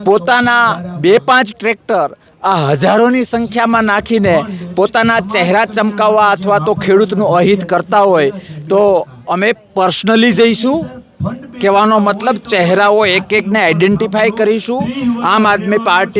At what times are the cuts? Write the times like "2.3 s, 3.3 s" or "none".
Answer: none